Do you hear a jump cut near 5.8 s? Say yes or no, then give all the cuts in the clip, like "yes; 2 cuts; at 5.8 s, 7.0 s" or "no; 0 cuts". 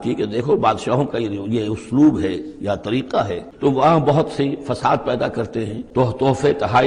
yes; 2 cuts; at 3.1 s, 5.8 s